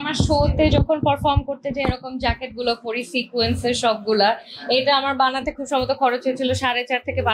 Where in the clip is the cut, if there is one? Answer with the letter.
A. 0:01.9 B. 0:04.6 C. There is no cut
C